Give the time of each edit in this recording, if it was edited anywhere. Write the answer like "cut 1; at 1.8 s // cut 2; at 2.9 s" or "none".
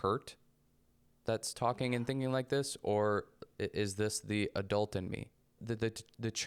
cut 1; at 5.5 s